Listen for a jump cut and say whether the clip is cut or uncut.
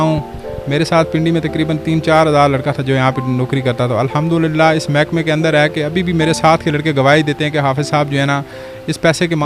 uncut